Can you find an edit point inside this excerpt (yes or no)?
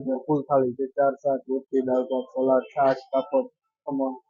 no